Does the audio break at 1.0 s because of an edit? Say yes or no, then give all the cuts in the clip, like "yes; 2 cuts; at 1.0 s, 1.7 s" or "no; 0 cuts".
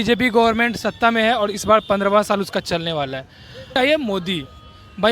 no; 1 cut; at 3.7 s